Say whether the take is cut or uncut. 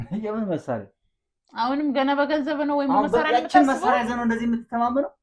uncut